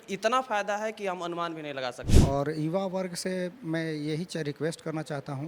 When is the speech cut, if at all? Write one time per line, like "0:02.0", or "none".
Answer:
0:02.1